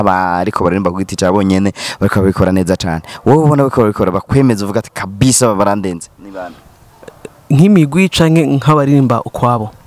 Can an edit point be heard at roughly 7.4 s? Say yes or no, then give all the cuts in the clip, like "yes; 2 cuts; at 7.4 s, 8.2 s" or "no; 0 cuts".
no; 0 cuts